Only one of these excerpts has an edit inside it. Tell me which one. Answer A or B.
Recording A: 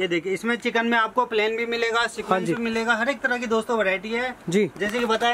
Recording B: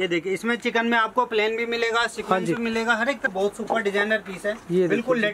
B